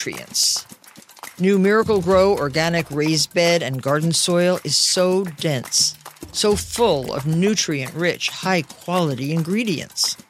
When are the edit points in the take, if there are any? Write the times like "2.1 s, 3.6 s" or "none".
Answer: none